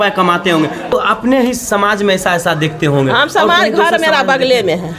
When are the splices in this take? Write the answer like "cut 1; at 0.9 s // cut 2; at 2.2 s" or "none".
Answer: cut 1; at 0.9 s